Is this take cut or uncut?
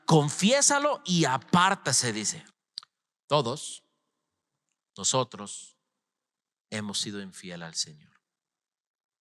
cut